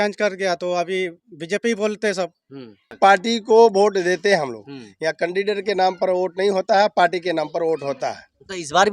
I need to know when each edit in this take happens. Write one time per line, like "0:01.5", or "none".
0:02.9